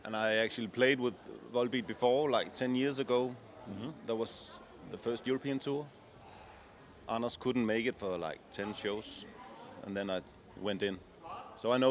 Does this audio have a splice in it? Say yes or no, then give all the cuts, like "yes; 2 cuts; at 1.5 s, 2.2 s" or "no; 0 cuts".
no; 0 cuts